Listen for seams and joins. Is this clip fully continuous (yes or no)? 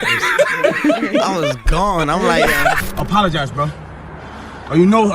no